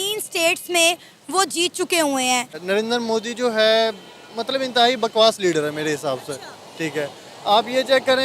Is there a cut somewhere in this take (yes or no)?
yes